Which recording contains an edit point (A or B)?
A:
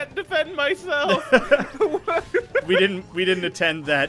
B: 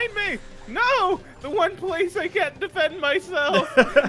A